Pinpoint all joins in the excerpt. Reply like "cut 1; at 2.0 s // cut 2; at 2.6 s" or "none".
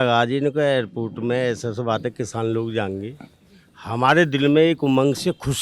none